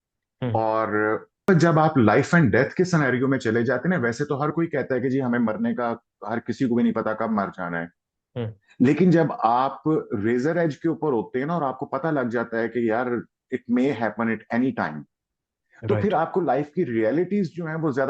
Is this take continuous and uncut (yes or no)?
no